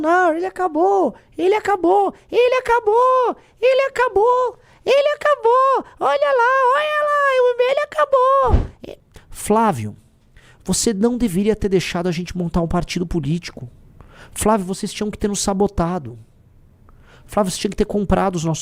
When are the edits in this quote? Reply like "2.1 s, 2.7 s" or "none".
8.9 s